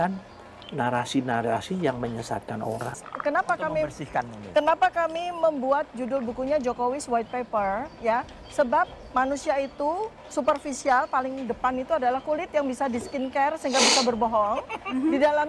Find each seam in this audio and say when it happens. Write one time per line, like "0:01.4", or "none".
0:02.9

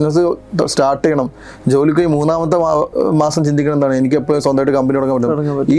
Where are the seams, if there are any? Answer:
none

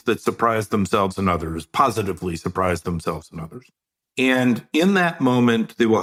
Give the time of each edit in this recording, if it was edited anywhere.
none

